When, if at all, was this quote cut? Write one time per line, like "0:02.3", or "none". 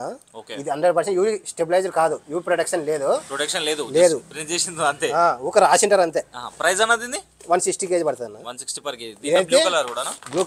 none